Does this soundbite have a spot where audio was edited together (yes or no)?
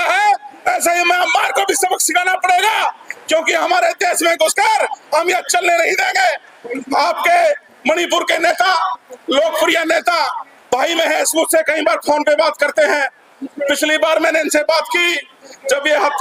no